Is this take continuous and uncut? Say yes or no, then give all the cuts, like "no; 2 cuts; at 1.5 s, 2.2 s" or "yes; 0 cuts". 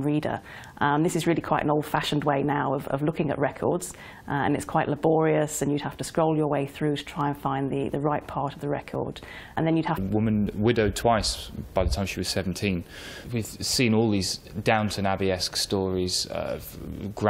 yes; 0 cuts